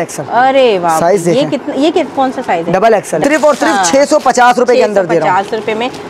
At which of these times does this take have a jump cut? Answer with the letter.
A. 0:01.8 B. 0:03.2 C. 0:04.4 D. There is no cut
B